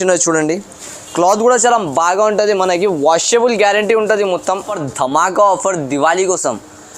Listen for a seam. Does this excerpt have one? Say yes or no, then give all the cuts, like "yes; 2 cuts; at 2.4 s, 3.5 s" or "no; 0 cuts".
yes; 1 cut; at 4.7 s